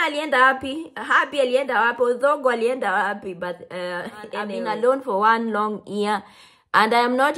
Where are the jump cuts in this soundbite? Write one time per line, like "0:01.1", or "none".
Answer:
0:04.5